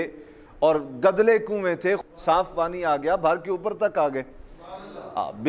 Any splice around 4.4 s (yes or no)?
no